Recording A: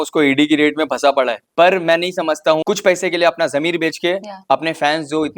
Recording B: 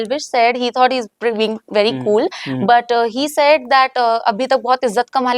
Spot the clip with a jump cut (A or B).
A